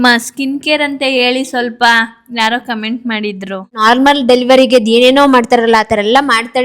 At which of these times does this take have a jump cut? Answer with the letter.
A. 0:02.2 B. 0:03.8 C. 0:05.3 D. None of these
B